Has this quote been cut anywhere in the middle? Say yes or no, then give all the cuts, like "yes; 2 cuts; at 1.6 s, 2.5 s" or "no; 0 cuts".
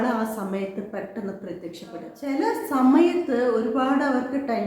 yes; 1 cut; at 2.2 s